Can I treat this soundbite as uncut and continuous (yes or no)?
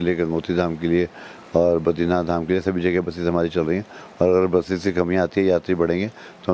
yes